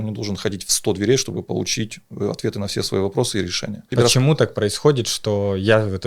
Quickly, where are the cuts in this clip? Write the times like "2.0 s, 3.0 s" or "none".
3.9 s